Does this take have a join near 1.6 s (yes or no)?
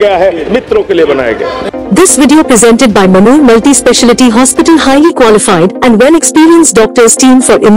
yes